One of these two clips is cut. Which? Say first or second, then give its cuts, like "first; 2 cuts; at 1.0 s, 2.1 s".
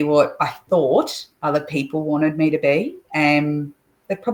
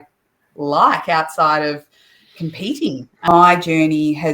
second; 1 cut; at 3.3 s